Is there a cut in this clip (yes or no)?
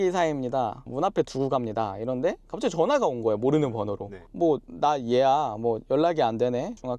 no